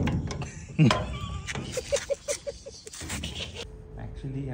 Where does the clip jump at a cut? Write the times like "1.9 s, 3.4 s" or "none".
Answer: 3.6 s